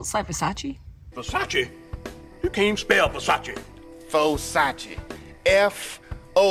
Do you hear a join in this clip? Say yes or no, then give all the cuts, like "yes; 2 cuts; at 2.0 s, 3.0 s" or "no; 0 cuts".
no; 0 cuts